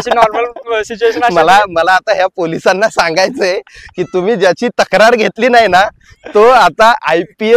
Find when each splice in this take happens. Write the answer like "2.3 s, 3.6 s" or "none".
none